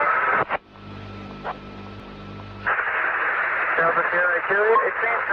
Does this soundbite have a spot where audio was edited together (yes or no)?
yes